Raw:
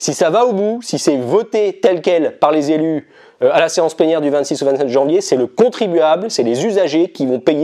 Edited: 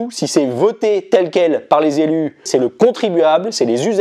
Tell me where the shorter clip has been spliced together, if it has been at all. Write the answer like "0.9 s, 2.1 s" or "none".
2.5 s